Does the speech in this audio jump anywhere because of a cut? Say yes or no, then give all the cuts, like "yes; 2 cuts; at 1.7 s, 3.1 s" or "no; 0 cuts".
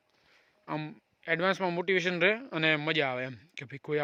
no; 0 cuts